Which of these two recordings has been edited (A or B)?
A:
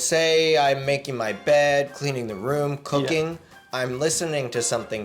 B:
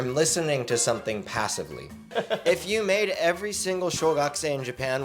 B